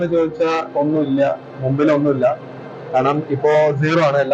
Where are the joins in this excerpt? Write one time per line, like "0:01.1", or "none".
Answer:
none

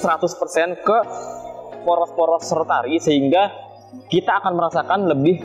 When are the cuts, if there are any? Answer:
none

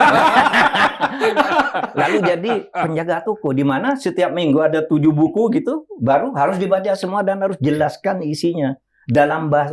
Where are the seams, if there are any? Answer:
none

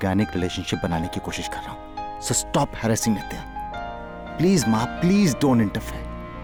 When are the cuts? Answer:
none

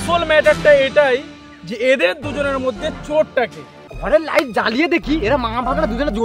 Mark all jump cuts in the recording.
0:03.4

